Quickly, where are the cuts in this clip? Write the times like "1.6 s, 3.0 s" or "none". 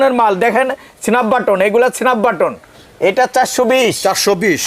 2.7 s